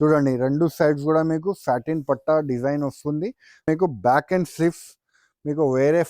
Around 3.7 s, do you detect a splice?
yes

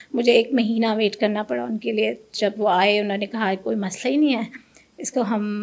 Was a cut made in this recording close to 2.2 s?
no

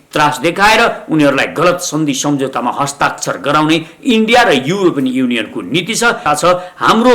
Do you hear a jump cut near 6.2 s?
yes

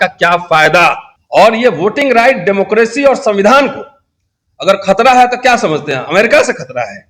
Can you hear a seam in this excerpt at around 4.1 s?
no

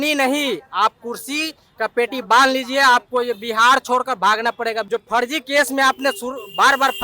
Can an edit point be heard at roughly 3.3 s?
no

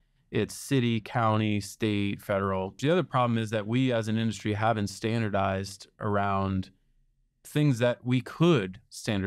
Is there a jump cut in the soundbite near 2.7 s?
yes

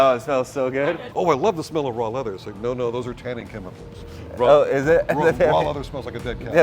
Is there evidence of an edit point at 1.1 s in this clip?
yes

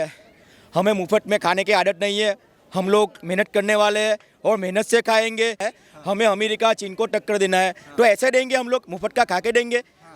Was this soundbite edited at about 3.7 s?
no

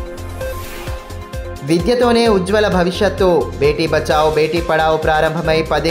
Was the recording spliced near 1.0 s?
yes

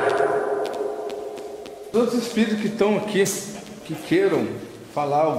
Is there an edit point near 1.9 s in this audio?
yes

